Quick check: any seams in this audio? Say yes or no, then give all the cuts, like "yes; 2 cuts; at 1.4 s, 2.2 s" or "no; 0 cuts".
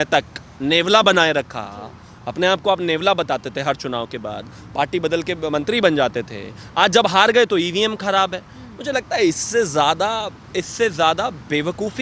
no; 0 cuts